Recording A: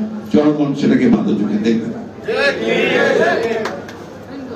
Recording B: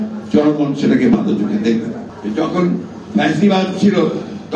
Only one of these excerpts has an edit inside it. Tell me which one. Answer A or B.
B